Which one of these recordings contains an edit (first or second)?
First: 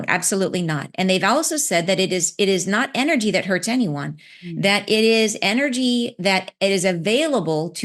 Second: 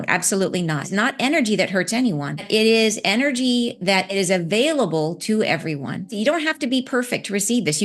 second